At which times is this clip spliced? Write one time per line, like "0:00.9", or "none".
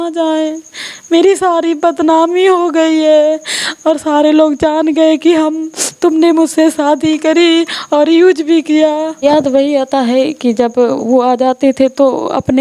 0:09.2